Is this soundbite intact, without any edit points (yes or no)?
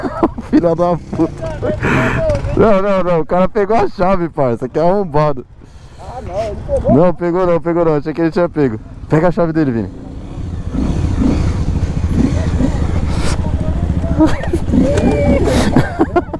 yes